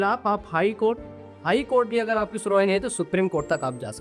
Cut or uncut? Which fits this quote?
uncut